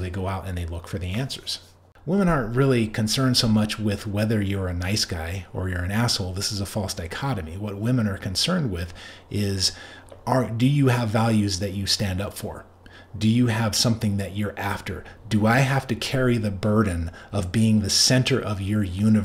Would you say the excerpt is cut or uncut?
cut